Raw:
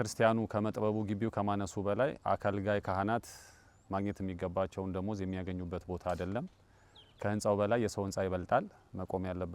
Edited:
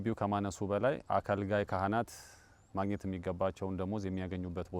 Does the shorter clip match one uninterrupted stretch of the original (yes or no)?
yes